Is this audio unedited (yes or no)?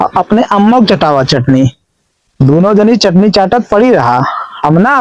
yes